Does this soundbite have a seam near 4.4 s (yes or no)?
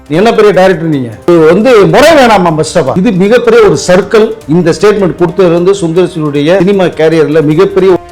yes